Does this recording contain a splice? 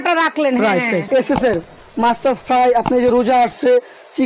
yes; 1 cut; at 1.0 s

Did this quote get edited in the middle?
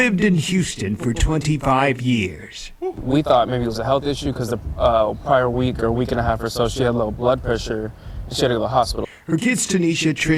no; 0 cuts

